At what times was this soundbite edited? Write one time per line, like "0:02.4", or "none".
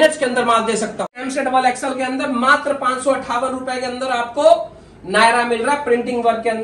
0:01.1